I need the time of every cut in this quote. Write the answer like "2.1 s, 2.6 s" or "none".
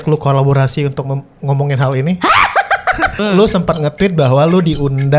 3.2 s